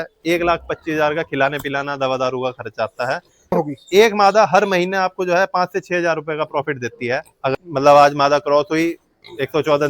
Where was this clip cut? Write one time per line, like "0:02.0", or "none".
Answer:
0:03.5
0:07.5